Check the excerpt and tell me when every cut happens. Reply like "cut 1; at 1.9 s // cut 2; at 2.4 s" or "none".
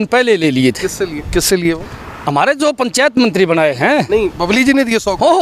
none